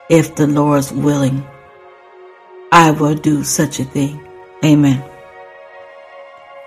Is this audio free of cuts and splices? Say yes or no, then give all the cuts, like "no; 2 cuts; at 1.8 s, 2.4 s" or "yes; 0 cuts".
no; 1 cut; at 5.0 s